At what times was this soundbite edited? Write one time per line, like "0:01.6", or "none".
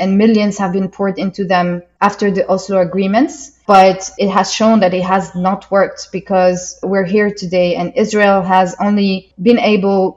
0:01.9
0:03.5
0:04.1
0:06.7